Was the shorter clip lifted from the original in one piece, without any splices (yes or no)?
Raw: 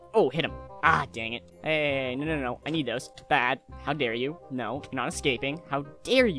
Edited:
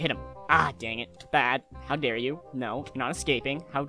no